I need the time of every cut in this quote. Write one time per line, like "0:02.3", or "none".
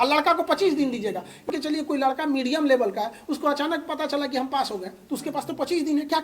0:01.5

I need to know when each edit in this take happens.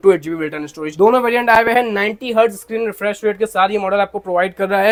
none

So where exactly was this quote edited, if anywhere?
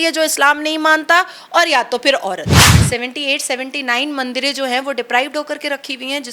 0:02.7

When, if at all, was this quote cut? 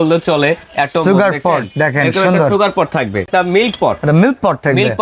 0:03.3

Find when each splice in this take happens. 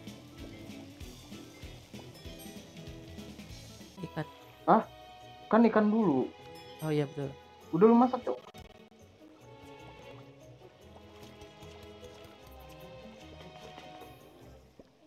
0:04.0

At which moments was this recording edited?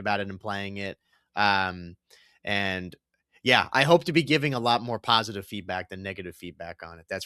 none

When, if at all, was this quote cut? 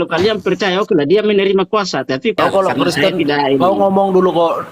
0:02.4

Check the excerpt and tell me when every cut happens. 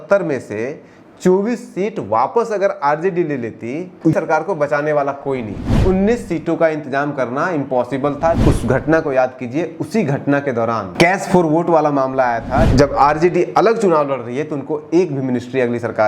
0:04.1
0:05.6
0:08.4
0:10.9
0:12.7

